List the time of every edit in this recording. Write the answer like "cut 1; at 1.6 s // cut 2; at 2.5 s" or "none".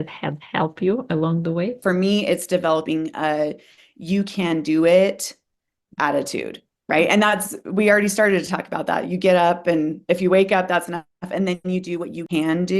cut 1; at 1.8 s